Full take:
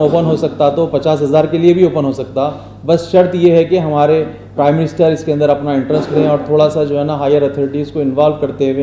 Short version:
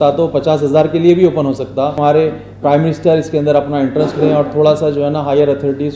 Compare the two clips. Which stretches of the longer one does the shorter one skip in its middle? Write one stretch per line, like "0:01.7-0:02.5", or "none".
0:02.5-0:03.9